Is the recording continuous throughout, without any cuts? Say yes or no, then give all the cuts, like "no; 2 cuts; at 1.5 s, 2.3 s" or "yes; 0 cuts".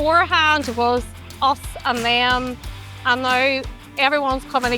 yes; 0 cuts